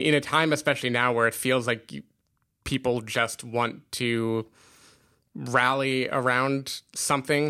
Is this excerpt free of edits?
yes; 0 cuts

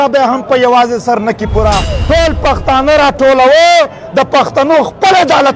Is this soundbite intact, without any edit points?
no; 1 cut; at 1.9 s

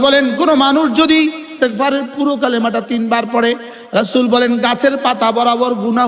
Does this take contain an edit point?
yes; 1 cut; at 1.5 s

